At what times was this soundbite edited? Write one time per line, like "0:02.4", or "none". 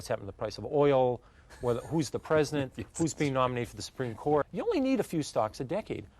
0:04.4